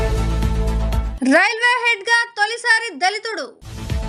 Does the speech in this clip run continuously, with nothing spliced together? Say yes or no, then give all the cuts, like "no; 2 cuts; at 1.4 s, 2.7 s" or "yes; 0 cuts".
yes; 0 cuts